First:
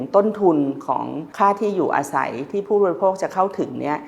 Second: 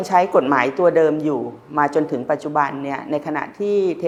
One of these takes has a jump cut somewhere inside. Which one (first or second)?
first